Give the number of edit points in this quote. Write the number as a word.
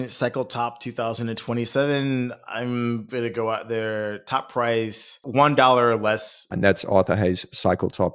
two